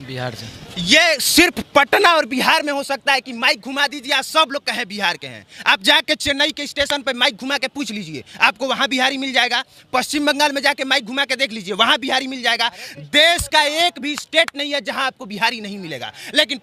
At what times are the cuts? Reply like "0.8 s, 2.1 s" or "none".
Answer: none